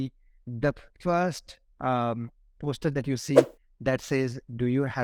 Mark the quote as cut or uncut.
uncut